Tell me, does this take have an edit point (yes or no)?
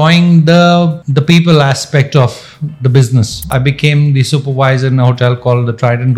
yes